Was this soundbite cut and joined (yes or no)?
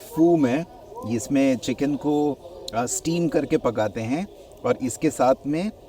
no